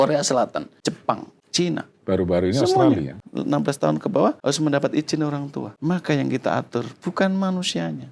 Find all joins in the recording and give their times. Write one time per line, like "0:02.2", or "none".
0:01.0
0:03.2
0:04.4
0:05.6